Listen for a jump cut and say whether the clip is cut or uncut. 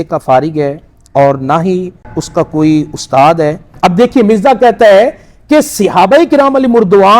cut